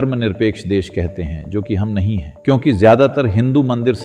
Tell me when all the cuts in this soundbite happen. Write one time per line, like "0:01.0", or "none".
0:02.3